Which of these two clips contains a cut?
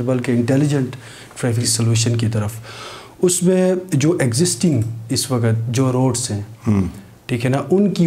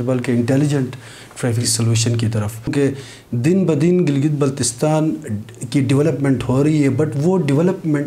second; 1 cut; at 2.7 s

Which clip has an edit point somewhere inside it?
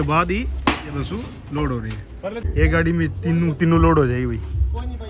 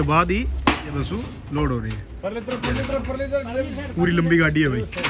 first; 1 cut; at 2.4 s

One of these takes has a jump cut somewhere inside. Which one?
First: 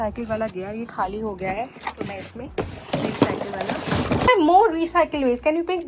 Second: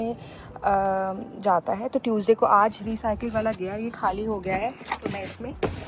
first; 1 cut; at 4.3 s

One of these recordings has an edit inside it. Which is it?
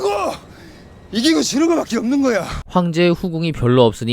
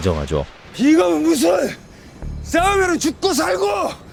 first; 1 cut; at 2.6 s

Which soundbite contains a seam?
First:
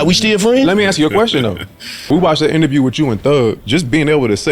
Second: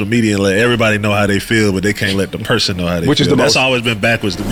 first; 2 cuts; at 2.1 s, 3.6 s

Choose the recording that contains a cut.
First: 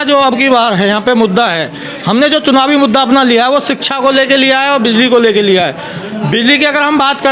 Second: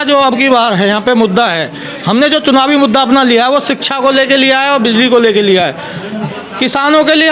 second; 1 cut; at 6.2 s

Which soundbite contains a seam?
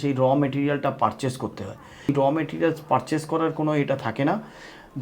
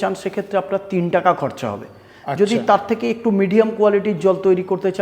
first; 1 cut; at 2.1 s

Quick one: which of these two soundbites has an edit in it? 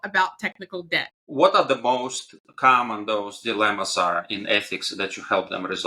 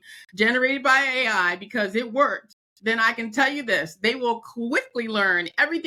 first; 1 cut; at 1.2 s

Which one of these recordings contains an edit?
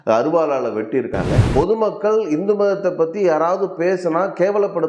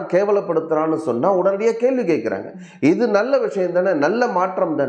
first; 1 cut; at 1.3 s

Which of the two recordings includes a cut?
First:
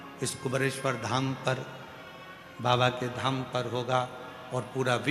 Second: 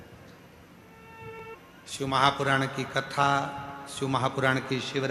second; 1 cut; at 1.4 s

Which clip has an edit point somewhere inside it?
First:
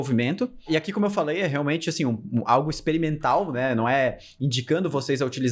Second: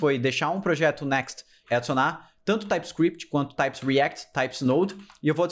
second; 1 cut; at 1.6 s

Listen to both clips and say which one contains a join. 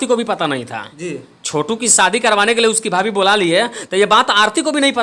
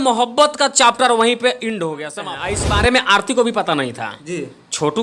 second; 1 cut; at 2.2 s

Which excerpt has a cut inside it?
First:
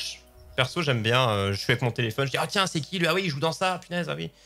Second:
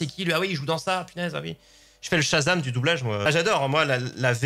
second; 1 cut; at 3.3 s

